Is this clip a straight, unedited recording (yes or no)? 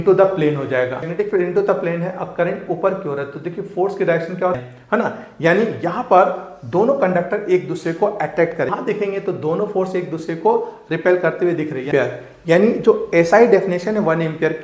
no